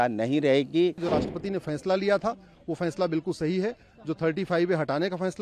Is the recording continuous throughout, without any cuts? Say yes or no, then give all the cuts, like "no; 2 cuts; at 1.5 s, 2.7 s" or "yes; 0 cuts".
no; 1 cut; at 1.0 s